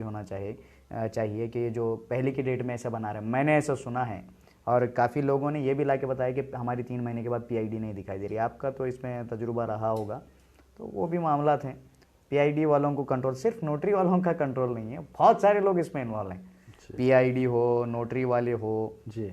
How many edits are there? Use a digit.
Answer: 0